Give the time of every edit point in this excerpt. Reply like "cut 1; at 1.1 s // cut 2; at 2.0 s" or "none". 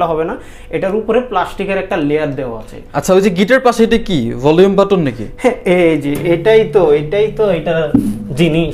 none